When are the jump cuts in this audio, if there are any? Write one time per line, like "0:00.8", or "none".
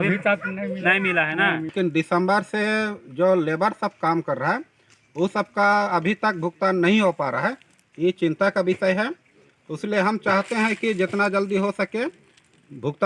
0:01.7